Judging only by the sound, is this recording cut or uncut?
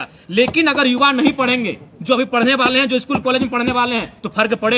uncut